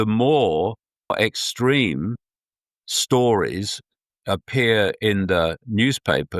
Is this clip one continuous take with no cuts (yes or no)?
no